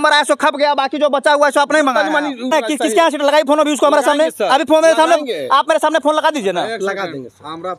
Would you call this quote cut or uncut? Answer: cut